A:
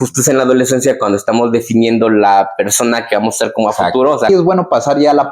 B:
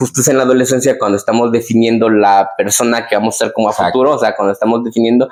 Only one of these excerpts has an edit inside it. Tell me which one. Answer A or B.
A